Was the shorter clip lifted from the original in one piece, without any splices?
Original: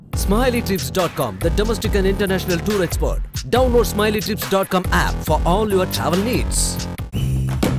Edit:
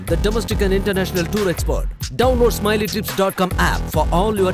yes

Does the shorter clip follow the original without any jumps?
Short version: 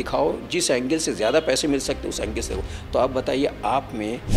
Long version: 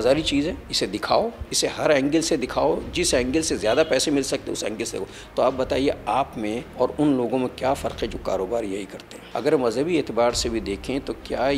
yes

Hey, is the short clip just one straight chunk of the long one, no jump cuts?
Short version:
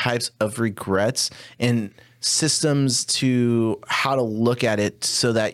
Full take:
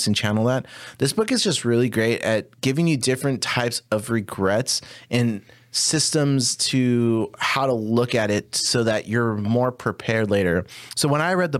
yes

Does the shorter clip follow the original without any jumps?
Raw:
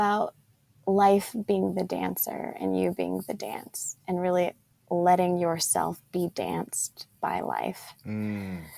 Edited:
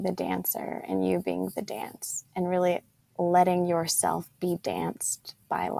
yes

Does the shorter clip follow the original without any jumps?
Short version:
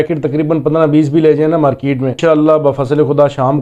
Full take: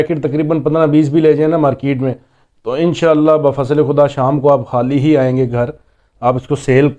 no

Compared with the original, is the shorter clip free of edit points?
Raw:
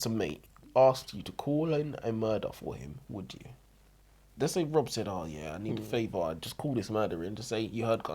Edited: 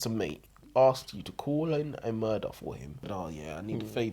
no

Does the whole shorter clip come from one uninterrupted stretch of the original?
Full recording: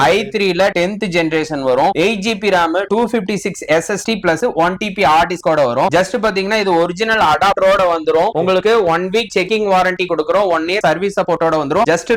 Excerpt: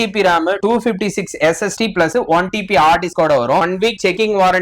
no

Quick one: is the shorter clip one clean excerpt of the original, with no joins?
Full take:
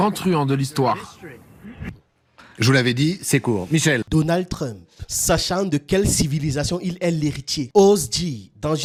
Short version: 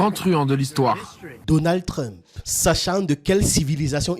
no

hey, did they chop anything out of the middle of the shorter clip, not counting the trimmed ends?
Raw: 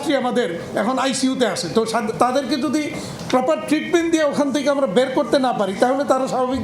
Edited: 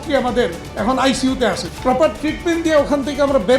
yes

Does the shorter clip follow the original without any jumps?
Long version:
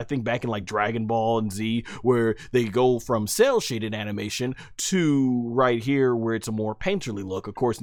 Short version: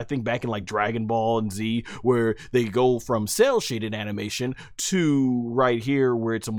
yes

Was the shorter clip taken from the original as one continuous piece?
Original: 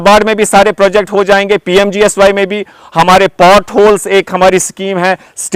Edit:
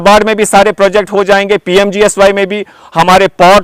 yes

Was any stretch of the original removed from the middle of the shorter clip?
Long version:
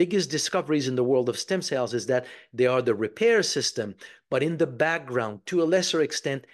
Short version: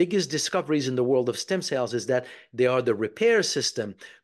no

